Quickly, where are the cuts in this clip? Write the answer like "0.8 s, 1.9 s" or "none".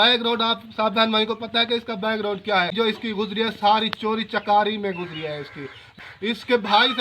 2.7 s, 5.9 s